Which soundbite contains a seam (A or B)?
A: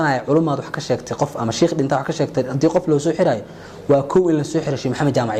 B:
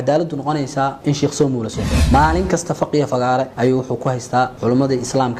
B